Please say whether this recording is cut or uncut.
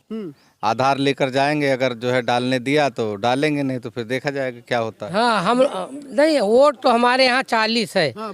cut